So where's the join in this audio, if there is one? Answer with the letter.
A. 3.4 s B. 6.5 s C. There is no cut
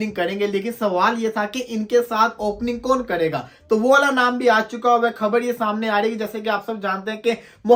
C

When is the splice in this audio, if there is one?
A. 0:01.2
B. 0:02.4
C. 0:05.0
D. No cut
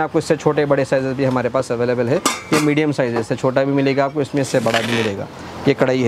D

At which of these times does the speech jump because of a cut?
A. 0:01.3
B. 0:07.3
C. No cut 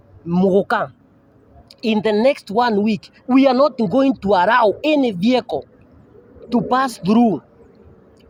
C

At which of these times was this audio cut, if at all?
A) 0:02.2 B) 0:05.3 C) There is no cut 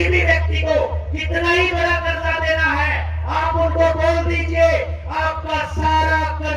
C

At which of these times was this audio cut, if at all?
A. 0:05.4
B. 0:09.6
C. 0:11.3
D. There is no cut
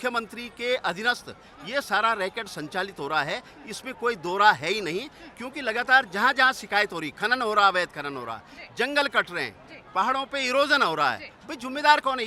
D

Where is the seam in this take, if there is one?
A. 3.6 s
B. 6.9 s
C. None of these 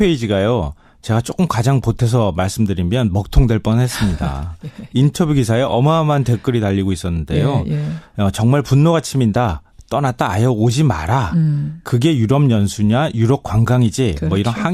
A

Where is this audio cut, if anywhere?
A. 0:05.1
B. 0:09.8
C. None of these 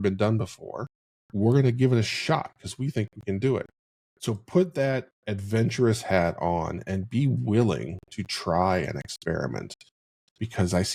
C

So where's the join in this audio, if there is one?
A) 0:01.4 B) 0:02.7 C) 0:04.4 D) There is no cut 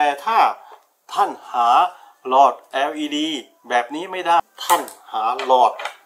C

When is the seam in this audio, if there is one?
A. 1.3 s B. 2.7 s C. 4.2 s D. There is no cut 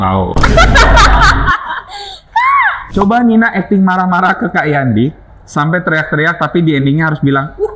B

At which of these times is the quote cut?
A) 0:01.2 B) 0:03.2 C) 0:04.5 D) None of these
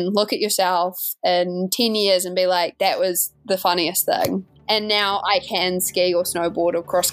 C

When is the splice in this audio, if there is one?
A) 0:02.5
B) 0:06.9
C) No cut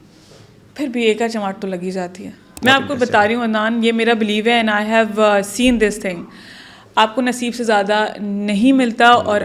A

